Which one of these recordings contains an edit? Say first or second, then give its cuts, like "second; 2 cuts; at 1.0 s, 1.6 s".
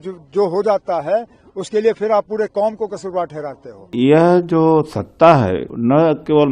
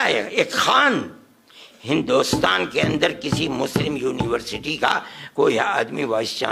first; 2 cuts; at 3.9 s, 5.7 s